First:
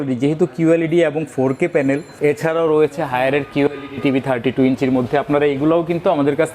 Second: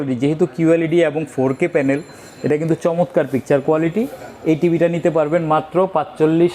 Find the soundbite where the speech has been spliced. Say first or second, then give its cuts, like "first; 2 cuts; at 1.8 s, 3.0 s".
first; 1 cut; at 2.1 s